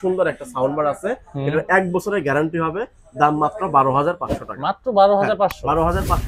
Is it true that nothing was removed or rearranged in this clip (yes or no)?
yes